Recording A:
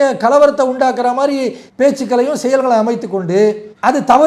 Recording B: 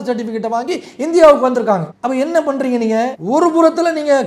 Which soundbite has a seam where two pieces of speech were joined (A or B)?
B